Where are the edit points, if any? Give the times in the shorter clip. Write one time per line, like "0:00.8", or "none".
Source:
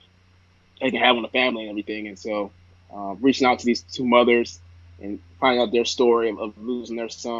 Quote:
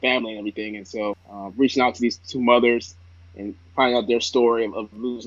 0:01.3